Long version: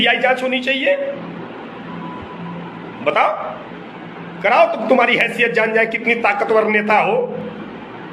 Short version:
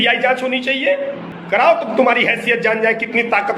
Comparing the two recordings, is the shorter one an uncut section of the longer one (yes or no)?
no